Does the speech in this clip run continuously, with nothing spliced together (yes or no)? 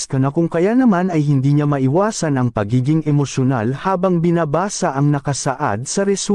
yes